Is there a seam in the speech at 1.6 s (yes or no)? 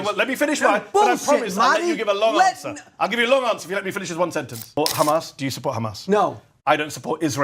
no